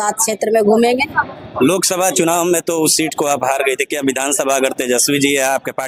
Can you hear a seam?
no; 0 cuts

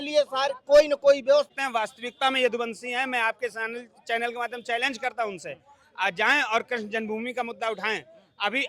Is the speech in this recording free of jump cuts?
no; 1 cut; at 1.5 s

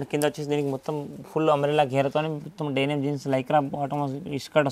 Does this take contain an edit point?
no; 0 cuts

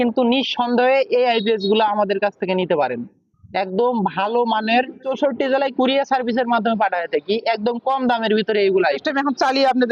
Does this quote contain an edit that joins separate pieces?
yes; 2 cuts; at 5.1 s, 9.0 s

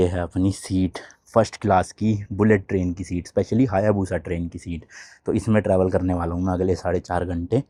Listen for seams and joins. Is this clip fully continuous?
yes; 0 cuts

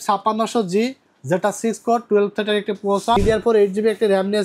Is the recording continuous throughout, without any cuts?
no; 1 cut; at 3.2 s

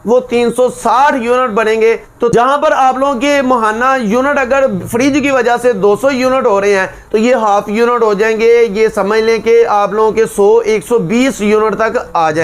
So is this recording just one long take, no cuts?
no; 2 cuts; at 2.3 s, 7.0 s

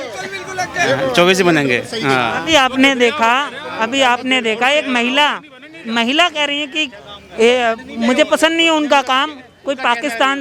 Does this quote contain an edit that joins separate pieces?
no; 0 cuts

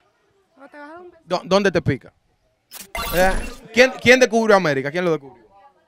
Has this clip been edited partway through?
yes; 1 cut; at 2.9 s

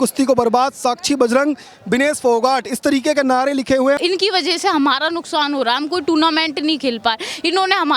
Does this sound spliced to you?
yes; 1 cut; at 4.0 s

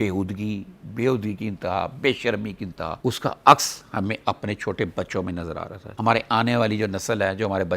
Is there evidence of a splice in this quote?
yes; 2 cuts; at 3.0 s, 6.0 s

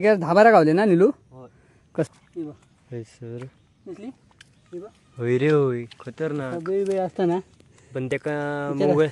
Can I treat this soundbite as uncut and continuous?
no; 1 cut; at 2.1 s

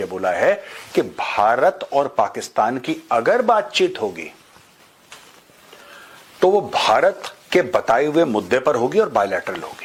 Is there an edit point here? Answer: no; 0 cuts

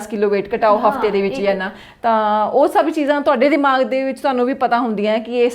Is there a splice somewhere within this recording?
no; 0 cuts

